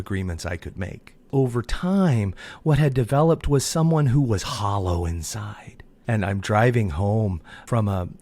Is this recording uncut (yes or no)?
no